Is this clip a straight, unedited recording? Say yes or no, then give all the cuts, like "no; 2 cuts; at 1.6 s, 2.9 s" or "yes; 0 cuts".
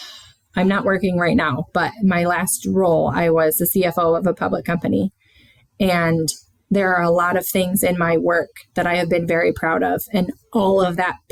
yes; 0 cuts